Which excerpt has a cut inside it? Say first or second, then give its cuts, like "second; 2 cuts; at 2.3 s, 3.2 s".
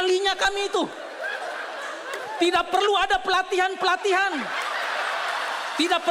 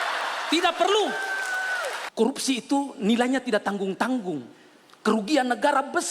second; 1 cut; at 2.0 s